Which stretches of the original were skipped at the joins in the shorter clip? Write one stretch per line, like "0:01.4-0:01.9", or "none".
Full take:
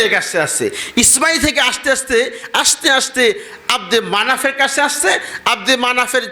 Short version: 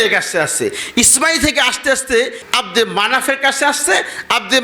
0:02.4-0:03.6